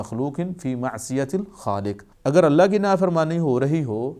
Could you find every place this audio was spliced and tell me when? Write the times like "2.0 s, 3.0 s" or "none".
2.1 s

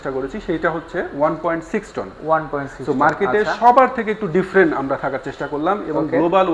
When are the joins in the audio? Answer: none

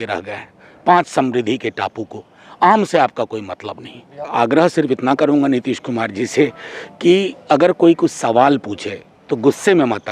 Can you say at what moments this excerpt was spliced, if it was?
4.2 s

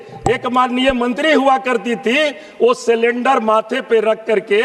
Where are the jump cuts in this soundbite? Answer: none

